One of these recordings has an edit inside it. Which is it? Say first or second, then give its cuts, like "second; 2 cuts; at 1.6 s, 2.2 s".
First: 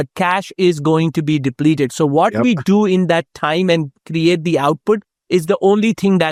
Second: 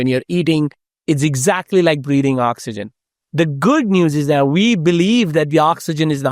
second; 1 cut; at 1.0 s